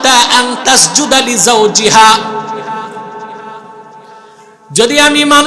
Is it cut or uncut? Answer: uncut